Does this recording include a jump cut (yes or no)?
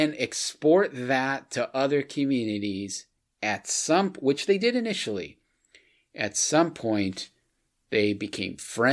no